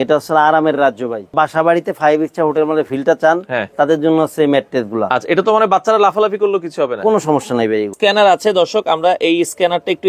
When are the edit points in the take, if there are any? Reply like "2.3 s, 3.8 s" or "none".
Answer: 1.3 s, 7.9 s